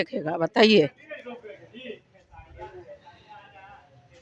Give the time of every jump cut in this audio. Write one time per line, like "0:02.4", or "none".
none

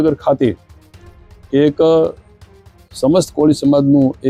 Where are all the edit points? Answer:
none

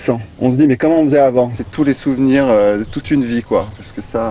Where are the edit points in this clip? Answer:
0:01.6

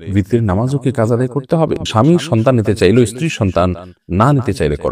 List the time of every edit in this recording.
0:01.8

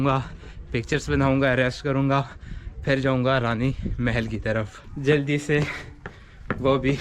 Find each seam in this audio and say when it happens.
0:04.9

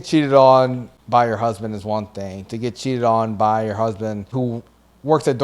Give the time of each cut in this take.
0:00.9
0:04.2

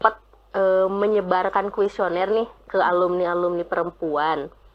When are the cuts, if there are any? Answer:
none

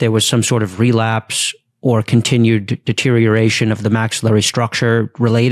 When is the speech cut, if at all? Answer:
none

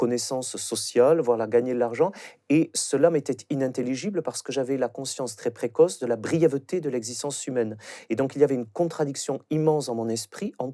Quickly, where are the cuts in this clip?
0:02.7

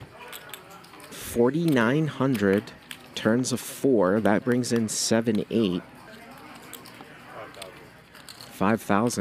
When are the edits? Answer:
0:06.1

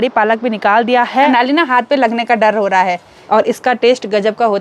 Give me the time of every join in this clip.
0:01.3
0:03.1

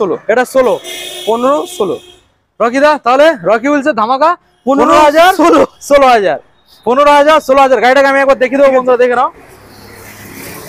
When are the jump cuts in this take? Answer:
none

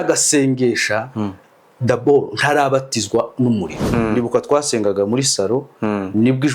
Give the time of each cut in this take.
0:03.8

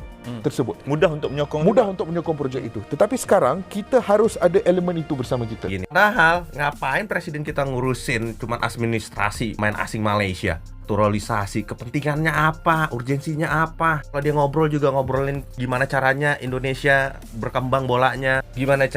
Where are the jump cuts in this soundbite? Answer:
0:05.7

